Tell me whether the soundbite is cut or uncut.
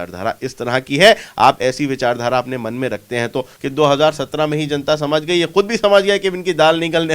cut